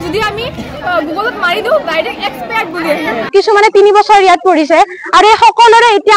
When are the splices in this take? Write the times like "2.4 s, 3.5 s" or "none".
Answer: 3.3 s